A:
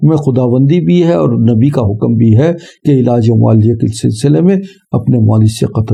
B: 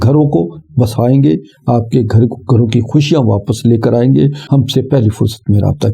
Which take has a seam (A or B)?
B